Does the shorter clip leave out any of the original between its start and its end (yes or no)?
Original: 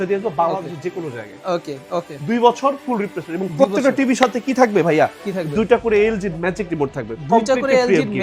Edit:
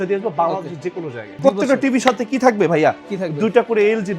yes